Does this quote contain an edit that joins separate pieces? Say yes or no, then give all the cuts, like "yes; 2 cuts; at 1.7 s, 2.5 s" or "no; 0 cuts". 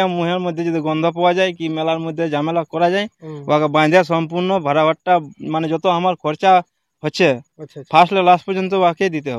no; 0 cuts